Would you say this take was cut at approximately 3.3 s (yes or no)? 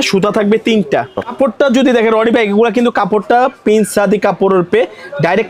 no